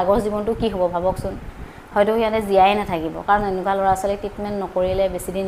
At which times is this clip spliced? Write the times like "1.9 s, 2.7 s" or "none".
none